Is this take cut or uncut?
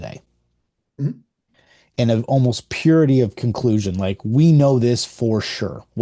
uncut